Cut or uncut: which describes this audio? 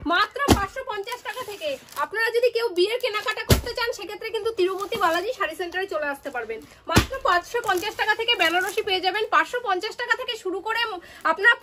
uncut